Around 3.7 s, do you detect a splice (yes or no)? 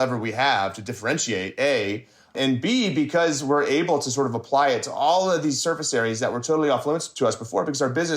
no